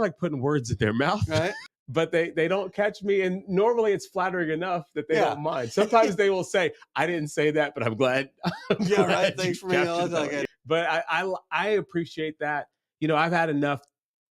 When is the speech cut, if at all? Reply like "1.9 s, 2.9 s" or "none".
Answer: 1.6 s, 10.4 s